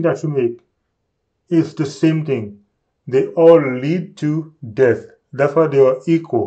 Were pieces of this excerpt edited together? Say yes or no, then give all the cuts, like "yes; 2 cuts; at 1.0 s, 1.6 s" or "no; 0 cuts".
no; 0 cuts